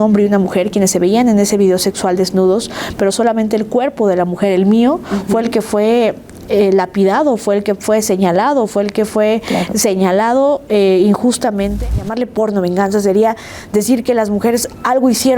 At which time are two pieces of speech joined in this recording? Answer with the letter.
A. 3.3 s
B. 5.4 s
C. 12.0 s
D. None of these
C